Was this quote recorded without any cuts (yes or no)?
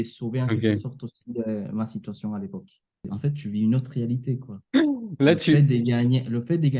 no